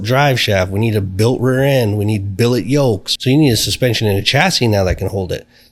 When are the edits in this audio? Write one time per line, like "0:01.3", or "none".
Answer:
0:03.1